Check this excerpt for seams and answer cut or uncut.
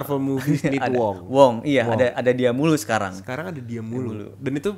uncut